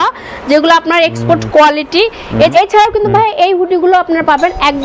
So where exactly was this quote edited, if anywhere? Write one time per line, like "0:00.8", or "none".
0:02.5